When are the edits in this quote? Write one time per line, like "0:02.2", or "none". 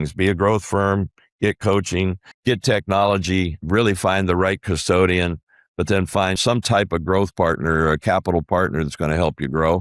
0:02.3
0:03.6
0:06.4

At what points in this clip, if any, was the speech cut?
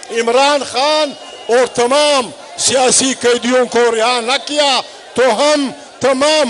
none

